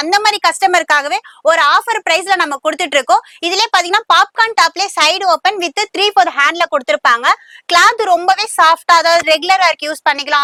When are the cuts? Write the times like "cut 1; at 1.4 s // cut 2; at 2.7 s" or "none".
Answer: none